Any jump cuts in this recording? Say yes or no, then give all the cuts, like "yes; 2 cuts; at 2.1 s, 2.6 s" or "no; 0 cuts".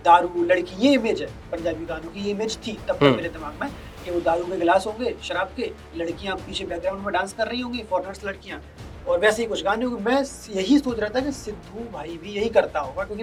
no; 0 cuts